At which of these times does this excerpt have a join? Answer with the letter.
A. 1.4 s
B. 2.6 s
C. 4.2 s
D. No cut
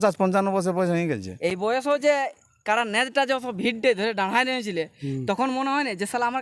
D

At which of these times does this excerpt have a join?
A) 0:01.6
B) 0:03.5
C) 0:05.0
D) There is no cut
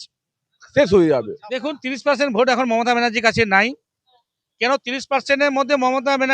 A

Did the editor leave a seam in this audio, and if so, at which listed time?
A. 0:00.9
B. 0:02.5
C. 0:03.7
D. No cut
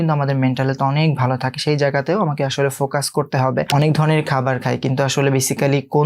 C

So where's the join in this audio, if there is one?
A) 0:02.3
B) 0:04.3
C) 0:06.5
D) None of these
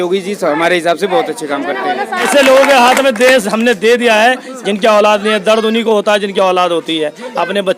A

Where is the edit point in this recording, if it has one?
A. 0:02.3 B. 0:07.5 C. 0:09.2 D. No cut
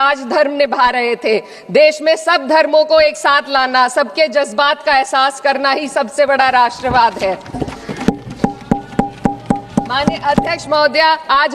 D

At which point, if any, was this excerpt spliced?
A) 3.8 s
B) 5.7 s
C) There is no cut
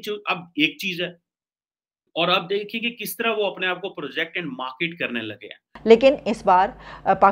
B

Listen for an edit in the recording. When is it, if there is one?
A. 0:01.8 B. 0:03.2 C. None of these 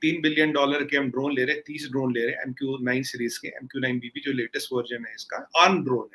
C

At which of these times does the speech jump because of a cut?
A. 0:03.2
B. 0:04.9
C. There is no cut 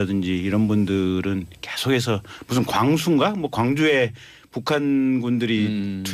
A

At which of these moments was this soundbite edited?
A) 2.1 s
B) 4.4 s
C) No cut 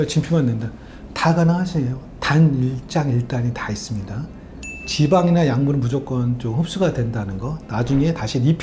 A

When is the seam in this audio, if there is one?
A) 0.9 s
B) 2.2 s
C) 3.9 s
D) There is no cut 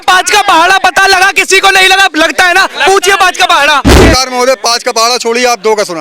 C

